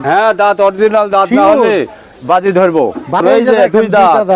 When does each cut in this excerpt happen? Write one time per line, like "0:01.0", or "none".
0:03.2